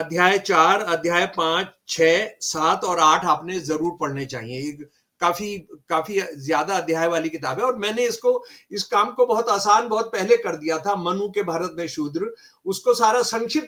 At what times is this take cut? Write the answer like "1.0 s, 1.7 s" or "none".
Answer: none

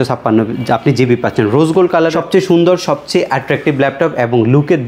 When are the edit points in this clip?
2.1 s

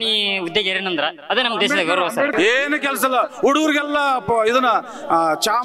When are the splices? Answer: 2.3 s

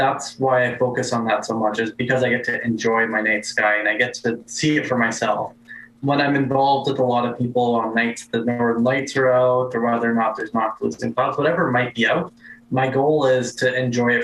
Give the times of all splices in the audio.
none

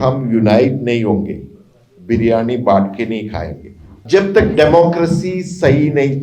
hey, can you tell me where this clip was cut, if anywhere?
4.0 s

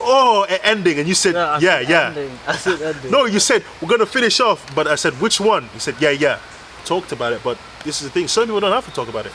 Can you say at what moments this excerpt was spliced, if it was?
6.8 s

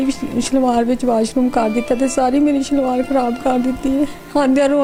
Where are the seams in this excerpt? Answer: none

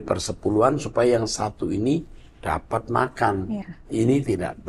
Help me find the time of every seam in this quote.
3.7 s

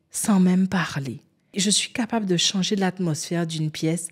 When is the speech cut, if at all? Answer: 1.6 s

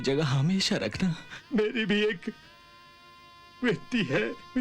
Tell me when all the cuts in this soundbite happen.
1.3 s

